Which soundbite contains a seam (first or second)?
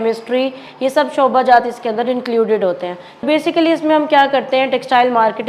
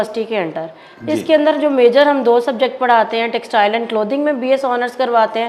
first